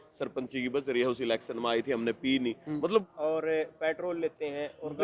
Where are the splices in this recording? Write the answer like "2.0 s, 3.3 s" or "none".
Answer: 3.1 s